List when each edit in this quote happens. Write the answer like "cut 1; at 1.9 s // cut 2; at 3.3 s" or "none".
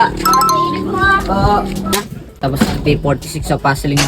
cut 1; at 1.9 s